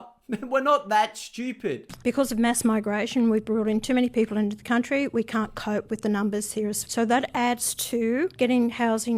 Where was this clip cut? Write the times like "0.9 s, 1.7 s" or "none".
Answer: 1.9 s